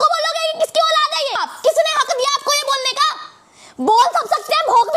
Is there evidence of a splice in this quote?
yes; 1 cut; at 1.5 s

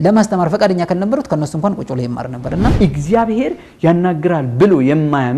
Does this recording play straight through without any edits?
no; 1 cut; at 2.7 s

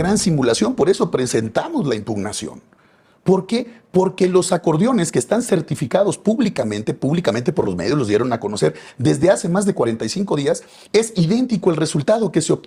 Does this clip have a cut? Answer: no; 0 cuts

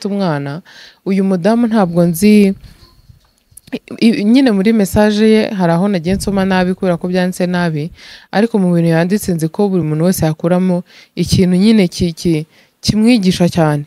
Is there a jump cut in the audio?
no; 0 cuts

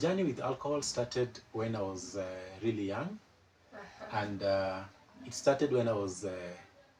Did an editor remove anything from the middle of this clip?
no; 0 cuts

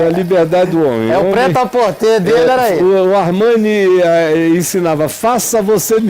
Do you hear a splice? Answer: no; 0 cuts

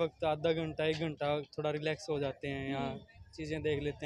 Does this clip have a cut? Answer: no; 0 cuts

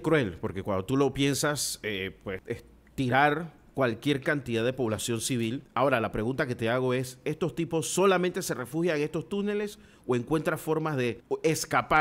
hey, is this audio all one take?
no; 3 cuts; at 2.4 s, 5.6 s, 11.2 s

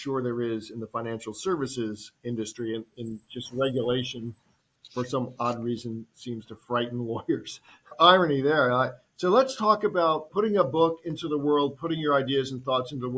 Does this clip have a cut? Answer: yes; 1 cut; at 10.3 s

